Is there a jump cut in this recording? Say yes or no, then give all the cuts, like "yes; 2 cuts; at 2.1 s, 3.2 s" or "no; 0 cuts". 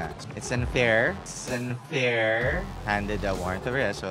yes; 2 cuts; at 1.3 s, 2.7 s